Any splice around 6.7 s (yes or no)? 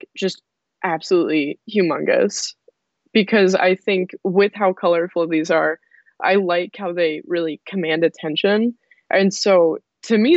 no